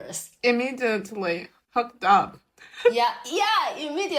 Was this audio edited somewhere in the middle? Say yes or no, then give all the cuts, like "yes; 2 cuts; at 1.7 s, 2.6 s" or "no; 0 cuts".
no; 0 cuts